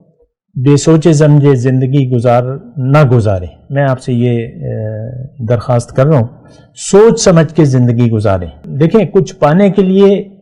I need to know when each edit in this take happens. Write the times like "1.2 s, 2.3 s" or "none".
8.6 s